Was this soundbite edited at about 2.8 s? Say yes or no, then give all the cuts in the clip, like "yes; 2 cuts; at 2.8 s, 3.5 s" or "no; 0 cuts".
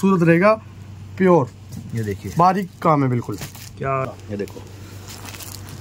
no; 1 cut; at 4.1 s